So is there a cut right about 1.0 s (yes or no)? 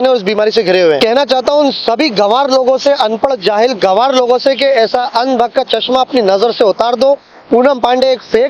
yes